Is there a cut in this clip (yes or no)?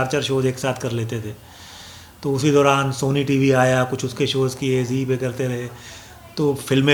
no